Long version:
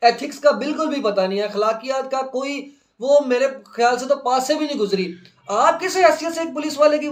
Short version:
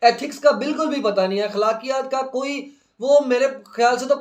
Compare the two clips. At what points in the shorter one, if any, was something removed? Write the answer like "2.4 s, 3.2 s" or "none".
none